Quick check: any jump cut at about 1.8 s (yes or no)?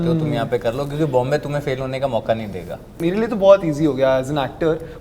no